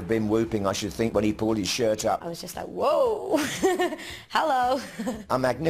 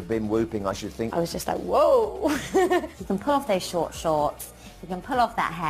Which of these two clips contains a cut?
second; 2 cuts; at 1.1 s, 3.0 s

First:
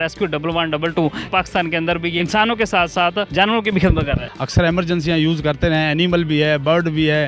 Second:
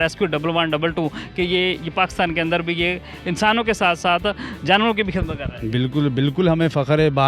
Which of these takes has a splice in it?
first; 4 cuts; at 1.2 s, 2.2 s, 3.3 s, 4.3 s

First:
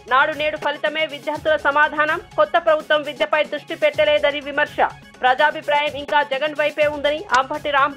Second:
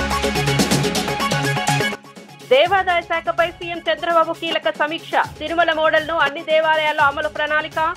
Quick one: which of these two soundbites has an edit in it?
second; 1 cut; at 1.9 s

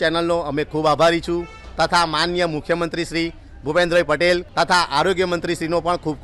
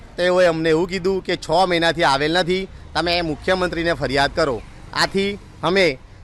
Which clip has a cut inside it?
first; 1 cut; at 4.5 s

